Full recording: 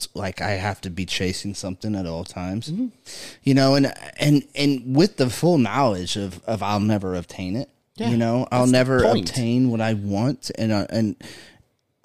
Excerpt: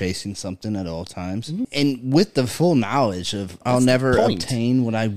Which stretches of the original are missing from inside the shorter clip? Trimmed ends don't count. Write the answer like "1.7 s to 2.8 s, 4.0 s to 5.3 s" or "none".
2.9 s to 4.5 s, 6.4 s to 8.5 s